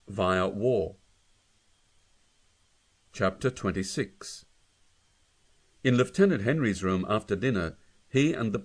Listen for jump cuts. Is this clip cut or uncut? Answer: uncut